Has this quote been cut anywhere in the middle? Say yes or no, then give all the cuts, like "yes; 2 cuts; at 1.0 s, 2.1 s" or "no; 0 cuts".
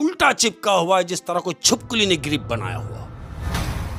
no; 0 cuts